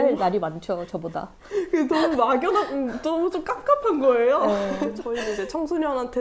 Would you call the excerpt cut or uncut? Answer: cut